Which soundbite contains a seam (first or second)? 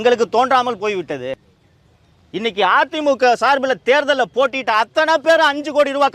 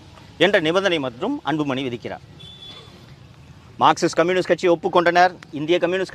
first